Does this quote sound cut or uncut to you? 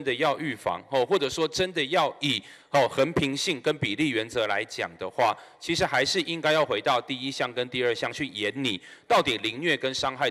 uncut